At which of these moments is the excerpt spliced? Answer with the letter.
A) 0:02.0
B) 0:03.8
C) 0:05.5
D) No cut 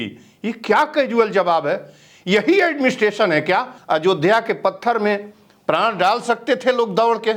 B